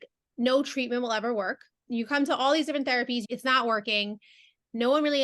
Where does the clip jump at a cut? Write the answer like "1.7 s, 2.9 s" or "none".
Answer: 1.7 s, 3.3 s